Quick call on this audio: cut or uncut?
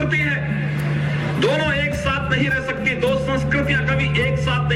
uncut